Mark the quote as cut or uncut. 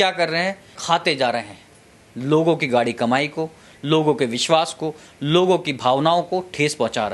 uncut